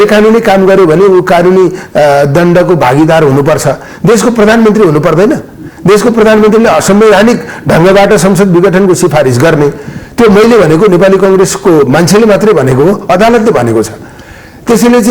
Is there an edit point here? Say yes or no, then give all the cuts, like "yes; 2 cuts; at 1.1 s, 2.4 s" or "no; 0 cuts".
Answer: no; 0 cuts